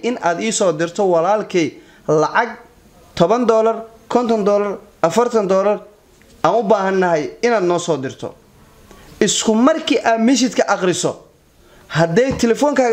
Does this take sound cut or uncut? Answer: cut